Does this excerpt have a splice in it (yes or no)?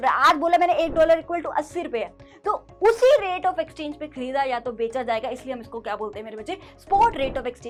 no